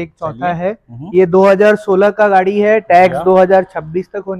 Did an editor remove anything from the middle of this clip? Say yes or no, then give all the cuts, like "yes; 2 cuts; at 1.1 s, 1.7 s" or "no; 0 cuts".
no; 0 cuts